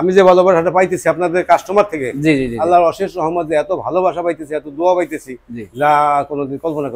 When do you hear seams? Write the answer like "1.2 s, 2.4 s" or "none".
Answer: none